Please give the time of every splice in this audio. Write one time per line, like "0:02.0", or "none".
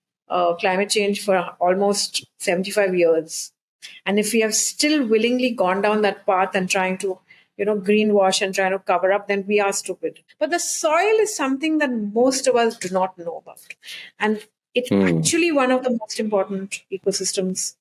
0:10.2